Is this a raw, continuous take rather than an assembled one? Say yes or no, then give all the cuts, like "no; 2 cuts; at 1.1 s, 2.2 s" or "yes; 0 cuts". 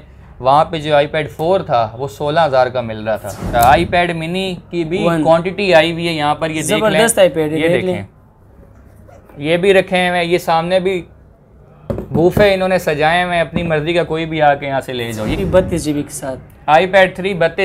no; 2 cuts; at 3.4 s, 15.4 s